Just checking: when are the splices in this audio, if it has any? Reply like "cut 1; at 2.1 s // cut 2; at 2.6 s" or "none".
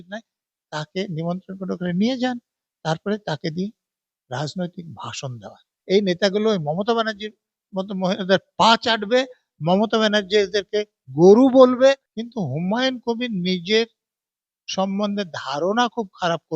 cut 1; at 5.7 s // cut 2; at 12.1 s